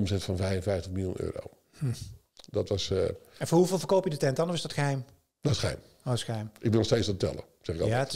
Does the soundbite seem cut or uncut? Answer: uncut